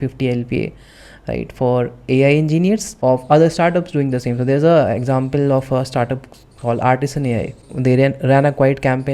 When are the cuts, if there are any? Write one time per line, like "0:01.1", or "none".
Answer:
0:02.9
0:07.7

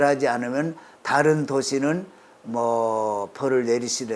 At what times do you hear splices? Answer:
none

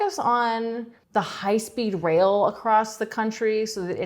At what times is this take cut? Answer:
0:00.9

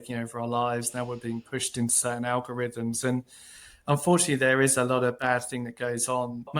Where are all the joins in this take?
none

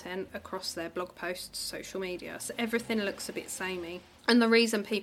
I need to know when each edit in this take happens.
0:04.1

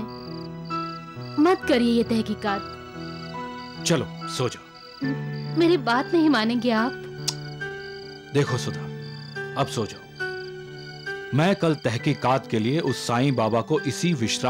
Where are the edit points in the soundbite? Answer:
none

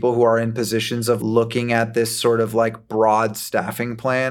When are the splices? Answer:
0:01.2

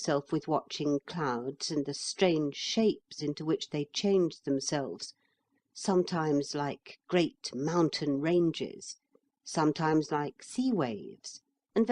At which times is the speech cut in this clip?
0:01.3

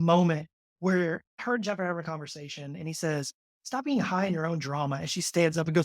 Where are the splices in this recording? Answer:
0:01.4

